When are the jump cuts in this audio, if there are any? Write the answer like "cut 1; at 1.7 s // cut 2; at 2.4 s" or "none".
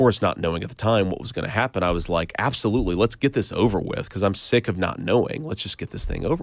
none